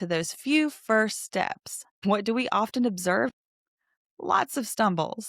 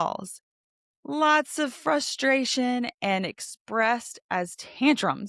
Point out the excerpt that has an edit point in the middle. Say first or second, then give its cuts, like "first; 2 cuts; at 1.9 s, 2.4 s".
first; 2 cuts; at 2.0 s, 3.3 s